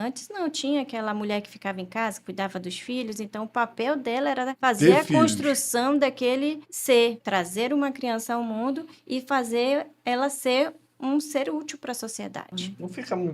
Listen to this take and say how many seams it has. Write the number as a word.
four